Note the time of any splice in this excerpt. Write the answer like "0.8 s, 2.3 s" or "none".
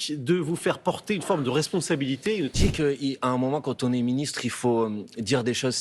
2.5 s